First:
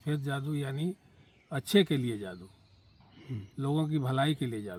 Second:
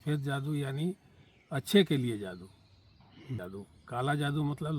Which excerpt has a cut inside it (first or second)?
second